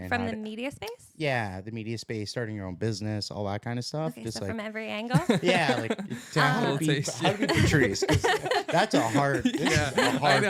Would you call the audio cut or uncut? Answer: uncut